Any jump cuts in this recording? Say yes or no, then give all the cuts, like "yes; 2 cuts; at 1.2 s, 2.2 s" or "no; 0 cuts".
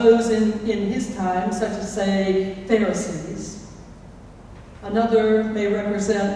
yes; 1 cut; at 4.2 s